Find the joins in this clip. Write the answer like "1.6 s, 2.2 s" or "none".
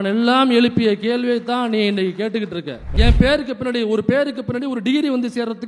2.9 s